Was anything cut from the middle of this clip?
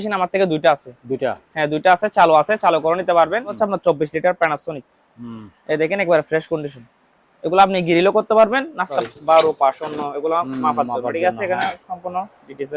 yes; 2 cuts; at 3.6 s, 9.0 s

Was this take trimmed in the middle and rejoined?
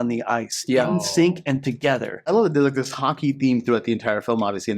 yes; 1 cut; at 2.2 s

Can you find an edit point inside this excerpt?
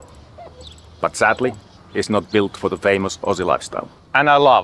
no; 0 cuts

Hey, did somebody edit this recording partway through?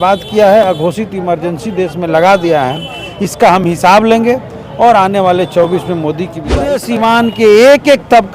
yes; 1 cut; at 6.8 s

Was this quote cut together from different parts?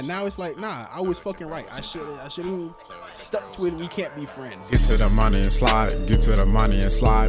yes; 1 cut; at 4.7 s

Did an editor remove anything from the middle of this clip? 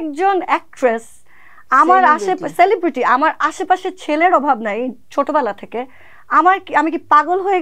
no; 0 cuts

